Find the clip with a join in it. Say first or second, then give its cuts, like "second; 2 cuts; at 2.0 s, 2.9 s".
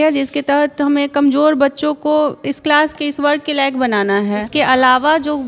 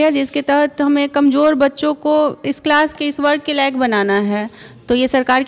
first; 1 cut; at 4.5 s